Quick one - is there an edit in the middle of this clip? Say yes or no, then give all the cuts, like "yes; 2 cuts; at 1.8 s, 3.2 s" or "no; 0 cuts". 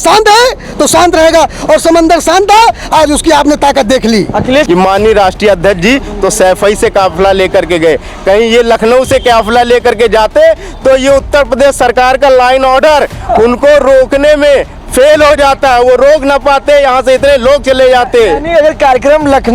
yes; 1 cut; at 4.7 s